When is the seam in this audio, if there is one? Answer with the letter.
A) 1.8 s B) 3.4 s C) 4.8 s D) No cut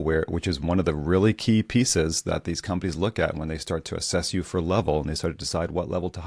D